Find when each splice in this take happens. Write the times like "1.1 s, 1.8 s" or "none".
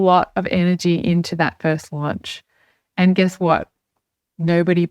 none

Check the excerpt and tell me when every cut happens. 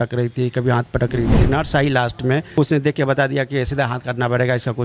1.4 s, 2.6 s

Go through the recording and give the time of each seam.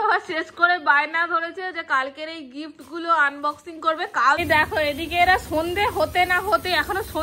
4.4 s

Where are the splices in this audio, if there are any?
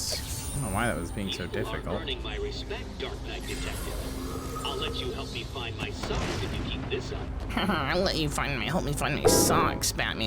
7.3 s

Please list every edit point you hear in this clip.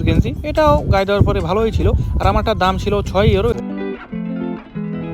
3.6 s

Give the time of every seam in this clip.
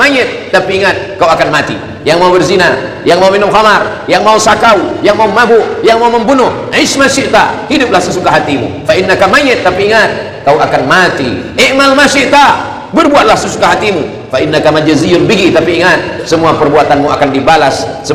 none

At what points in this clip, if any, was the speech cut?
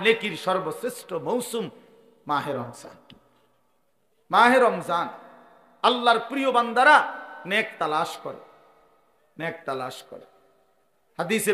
none

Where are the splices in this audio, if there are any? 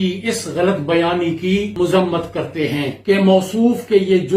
none

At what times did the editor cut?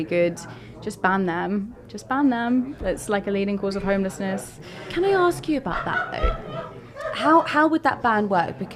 none

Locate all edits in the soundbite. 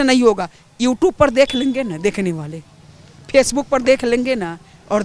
none

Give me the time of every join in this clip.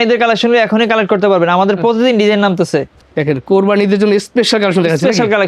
3.0 s

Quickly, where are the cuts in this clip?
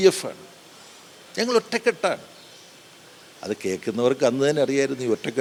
none

